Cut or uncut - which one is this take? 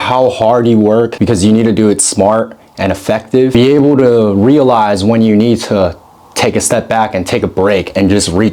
cut